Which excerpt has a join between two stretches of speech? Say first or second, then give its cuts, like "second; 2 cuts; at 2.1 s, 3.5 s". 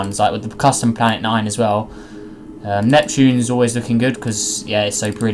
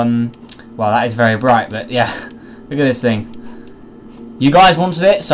second; 1 cut; at 1.6 s